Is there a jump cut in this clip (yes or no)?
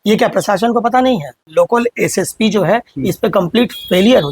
yes